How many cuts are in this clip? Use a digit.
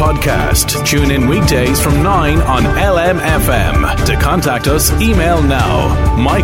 0